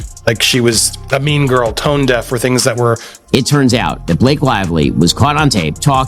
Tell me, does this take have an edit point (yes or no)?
yes